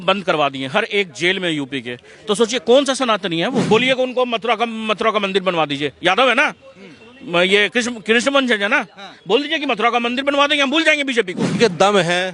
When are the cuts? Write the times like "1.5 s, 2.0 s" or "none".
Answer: 3.6 s, 11.6 s